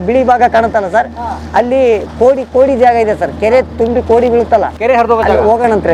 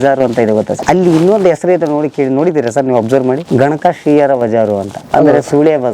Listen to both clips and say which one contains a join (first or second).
second